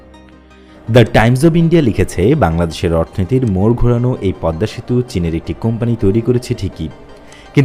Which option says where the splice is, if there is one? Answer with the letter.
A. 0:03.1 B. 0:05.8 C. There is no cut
C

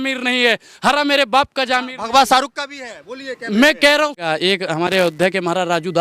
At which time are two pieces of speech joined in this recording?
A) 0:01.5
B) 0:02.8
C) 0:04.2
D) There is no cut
C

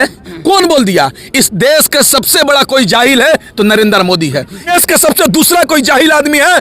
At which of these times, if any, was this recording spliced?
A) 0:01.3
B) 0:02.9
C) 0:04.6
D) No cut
C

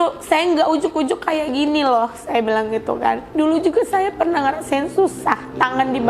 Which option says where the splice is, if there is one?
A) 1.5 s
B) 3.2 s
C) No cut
B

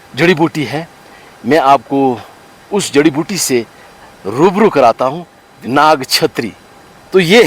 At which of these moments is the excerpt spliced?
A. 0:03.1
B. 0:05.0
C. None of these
B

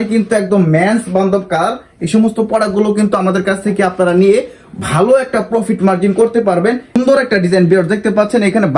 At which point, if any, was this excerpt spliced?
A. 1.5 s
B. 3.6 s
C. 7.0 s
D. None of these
C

